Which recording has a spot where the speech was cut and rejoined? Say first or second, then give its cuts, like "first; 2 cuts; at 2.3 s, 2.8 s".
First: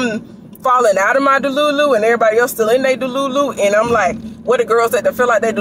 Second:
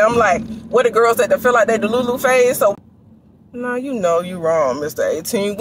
second; 1 cut; at 2.8 s